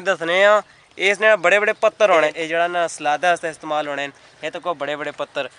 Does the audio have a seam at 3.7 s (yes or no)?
no